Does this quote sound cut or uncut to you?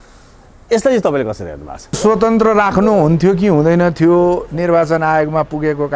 cut